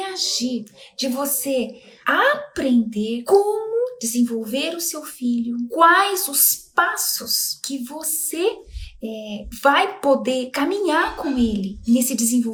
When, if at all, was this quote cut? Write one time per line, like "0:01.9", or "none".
none